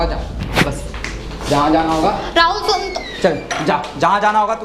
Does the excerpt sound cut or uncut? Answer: uncut